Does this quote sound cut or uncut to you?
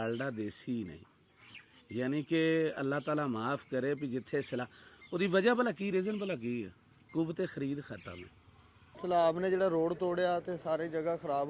cut